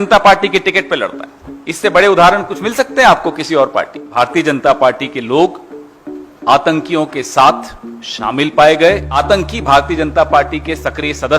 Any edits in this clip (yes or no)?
yes